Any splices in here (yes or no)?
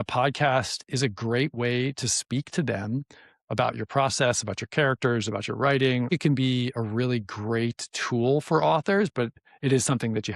yes